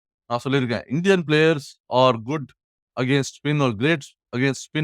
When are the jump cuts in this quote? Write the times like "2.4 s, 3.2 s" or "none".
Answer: none